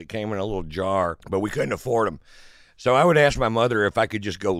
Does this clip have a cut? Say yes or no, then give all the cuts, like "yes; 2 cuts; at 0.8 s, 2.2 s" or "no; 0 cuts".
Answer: yes; 1 cut; at 1.2 s